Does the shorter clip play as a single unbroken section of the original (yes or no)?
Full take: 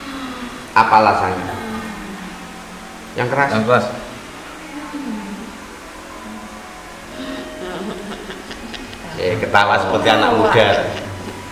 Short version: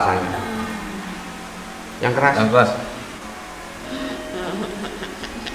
no